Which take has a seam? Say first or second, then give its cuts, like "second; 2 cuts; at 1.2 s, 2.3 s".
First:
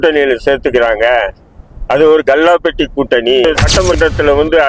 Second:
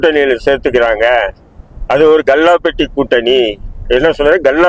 first; 1 cut; at 3.5 s